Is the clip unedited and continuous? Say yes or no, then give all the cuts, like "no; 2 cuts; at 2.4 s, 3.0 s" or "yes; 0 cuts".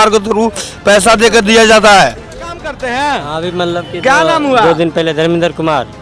no; 1 cut; at 2.7 s